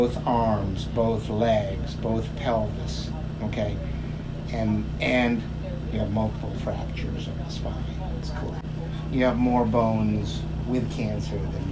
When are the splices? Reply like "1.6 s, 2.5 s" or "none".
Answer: none